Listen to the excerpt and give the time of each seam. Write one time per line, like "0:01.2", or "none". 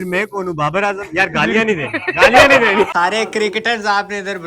0:02.9